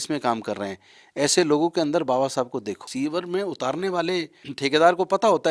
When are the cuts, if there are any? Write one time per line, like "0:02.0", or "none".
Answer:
0:02.8
0:04.5